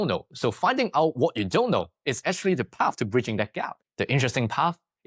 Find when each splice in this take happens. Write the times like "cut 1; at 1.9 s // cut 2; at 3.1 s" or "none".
cut 1; at 3.8 s

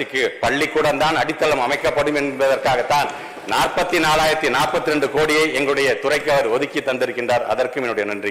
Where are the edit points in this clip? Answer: none

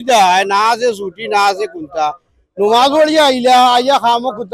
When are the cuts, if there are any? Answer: none

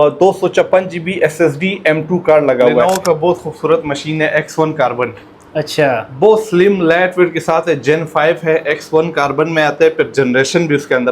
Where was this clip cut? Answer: cut 1; at 2.8 s

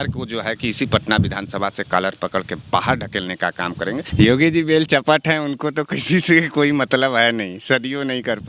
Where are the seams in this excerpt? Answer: cut 1; at 4.1 s

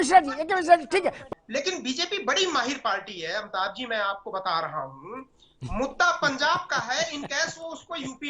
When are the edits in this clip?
cut 1; at 1.3 s

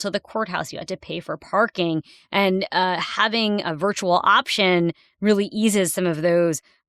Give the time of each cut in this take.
none

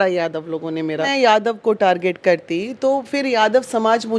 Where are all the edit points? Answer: cut 1; at 1.1 s

